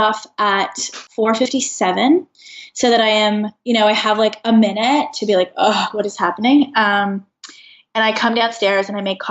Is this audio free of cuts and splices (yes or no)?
no